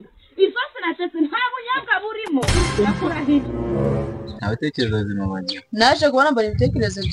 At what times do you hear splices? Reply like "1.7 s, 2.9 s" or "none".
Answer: 3.7 s